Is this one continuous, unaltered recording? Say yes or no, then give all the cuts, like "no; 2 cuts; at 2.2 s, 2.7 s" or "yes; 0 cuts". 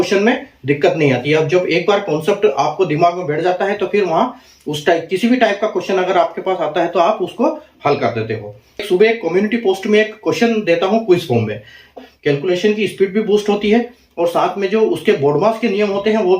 no; 2 cuts; at 8.8 s, 12.0 s